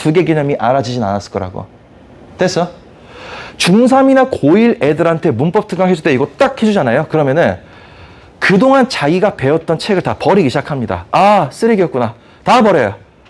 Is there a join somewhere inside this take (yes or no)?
no